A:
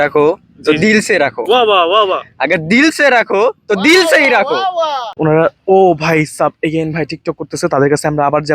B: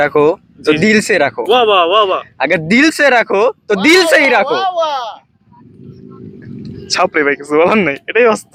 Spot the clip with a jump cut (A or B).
A